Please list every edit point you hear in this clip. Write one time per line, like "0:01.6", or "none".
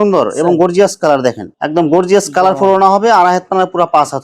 0:01.5